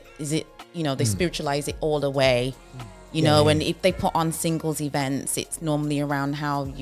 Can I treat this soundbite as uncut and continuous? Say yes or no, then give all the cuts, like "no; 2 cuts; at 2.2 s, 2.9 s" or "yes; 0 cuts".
yes; 0 cuts